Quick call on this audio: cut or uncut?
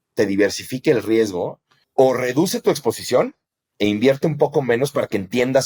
uncut